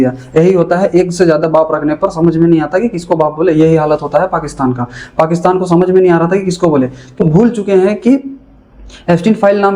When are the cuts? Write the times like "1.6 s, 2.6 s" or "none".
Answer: 7.2 s